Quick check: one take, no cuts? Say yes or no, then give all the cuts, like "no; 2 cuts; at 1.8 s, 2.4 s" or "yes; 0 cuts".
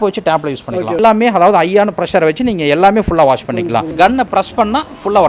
no; 2 cuts; at 1.0 s, 3.9 s